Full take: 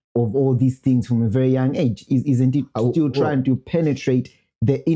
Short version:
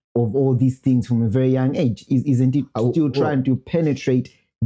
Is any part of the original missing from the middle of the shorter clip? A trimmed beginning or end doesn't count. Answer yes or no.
no